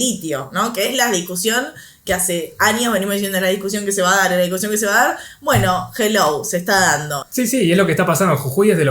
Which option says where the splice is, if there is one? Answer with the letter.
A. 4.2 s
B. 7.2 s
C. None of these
B